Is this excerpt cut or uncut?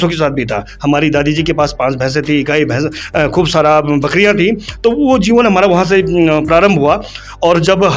uncut